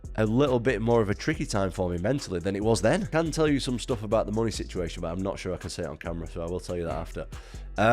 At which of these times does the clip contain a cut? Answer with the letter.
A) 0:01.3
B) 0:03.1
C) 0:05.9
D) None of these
B